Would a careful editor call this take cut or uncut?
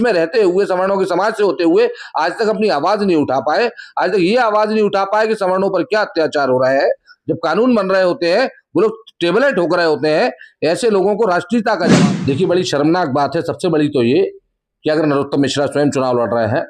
cut